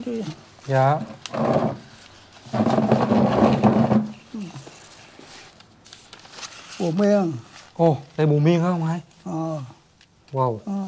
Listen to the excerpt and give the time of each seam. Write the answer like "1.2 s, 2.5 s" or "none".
5.5 s